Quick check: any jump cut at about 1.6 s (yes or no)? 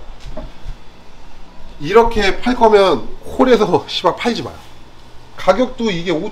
no